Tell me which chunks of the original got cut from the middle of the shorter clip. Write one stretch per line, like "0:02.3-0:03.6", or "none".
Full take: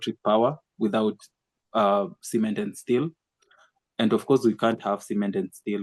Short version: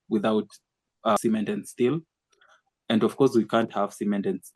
0:01.9-0:02.3

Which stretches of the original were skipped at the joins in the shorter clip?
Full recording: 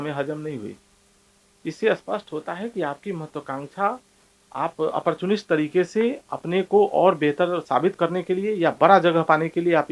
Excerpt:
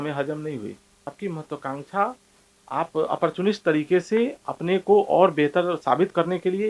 0:01.1-0:03.0

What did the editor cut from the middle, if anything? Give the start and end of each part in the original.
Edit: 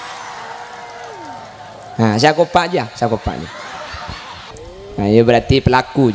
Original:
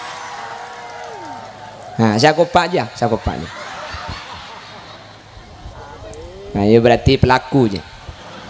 0:04.7-0:06.3

